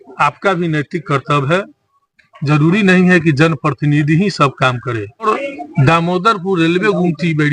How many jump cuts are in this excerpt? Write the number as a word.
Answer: one